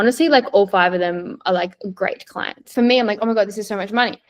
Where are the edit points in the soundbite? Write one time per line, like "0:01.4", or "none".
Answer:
0:02.7